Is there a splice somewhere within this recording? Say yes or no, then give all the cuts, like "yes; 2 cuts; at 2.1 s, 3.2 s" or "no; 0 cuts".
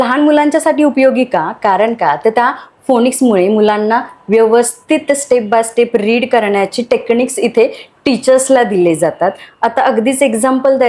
no; 0 cuts